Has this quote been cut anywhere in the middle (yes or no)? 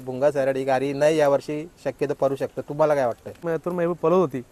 yes